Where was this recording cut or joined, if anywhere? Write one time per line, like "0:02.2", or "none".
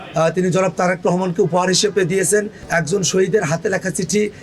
0:02.6